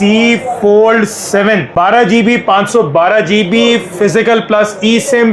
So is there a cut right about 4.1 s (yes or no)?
no